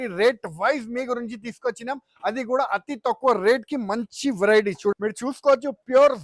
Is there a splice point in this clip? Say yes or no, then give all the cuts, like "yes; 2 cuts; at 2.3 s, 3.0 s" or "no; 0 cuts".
yes; 1 cut; at 4.9 s